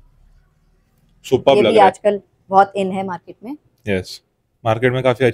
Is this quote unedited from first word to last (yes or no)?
yes